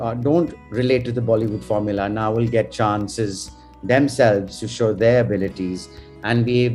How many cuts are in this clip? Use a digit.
0